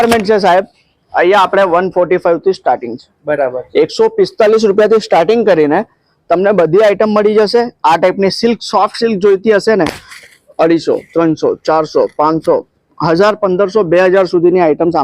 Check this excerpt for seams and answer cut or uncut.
uncut